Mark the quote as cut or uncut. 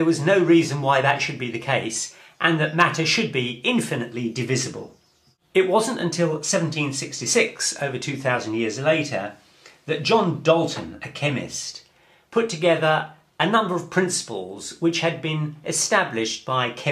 cut